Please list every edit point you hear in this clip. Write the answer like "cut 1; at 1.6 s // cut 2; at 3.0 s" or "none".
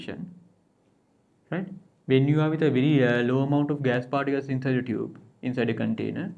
none